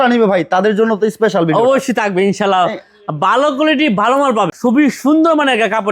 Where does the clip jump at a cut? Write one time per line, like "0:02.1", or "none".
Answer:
0:04.5